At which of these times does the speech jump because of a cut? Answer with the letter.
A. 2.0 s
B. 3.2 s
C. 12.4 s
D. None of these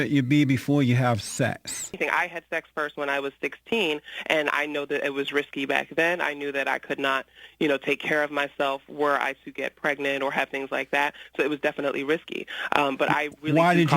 A